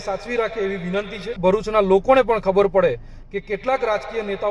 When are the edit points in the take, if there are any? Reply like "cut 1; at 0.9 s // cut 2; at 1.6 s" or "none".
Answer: cut 1; at 1.3 s